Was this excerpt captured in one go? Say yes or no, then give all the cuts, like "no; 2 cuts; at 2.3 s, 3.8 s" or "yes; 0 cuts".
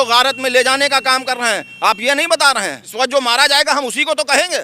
no; 1 cut; at 2.8 s